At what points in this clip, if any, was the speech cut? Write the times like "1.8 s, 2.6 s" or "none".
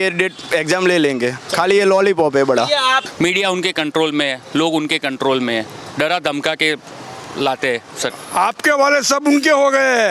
3.1 s, 8.1 s